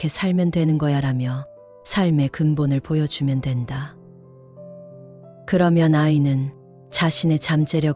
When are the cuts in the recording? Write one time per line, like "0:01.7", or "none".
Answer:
0:04.0
0:05.4